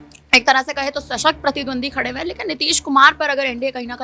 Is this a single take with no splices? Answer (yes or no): yes